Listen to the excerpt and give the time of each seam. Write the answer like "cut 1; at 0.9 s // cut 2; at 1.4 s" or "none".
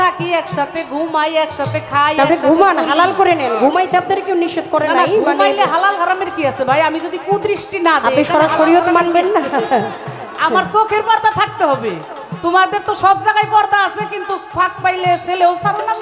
none